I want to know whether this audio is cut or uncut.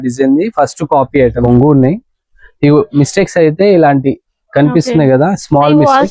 cut